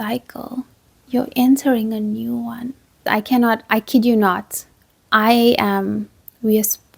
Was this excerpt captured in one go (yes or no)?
no